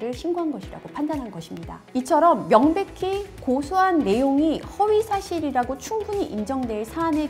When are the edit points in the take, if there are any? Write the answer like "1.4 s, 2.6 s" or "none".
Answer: none